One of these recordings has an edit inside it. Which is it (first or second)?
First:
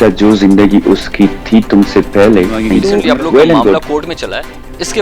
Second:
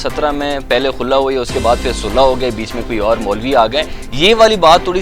first